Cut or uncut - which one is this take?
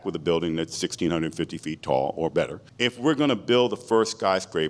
cut